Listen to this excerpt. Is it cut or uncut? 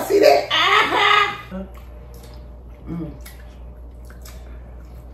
cut